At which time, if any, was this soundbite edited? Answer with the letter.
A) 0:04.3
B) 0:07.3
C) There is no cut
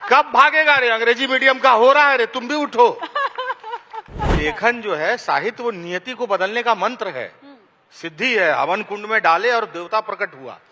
A